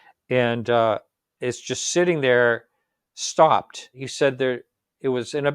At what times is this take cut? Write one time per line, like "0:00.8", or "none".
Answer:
0:04.0